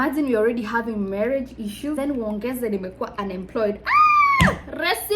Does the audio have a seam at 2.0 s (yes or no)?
yes